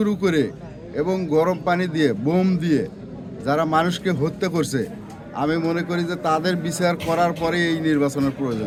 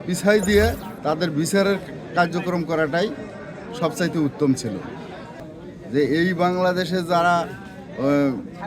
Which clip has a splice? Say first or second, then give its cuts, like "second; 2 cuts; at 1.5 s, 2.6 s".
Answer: second; 1 cut; at 5.2 s